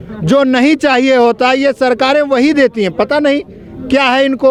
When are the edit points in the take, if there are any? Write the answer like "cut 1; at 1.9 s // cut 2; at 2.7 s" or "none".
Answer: none